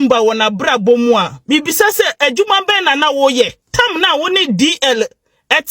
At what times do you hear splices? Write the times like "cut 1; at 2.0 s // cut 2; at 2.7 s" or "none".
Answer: cut 1; at 3.6 s